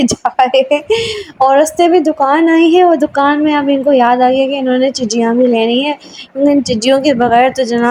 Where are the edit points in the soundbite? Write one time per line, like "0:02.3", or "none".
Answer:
none